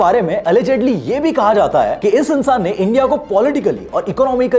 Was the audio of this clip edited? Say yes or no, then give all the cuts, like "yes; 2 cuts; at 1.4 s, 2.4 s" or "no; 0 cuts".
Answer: no; 0 cuts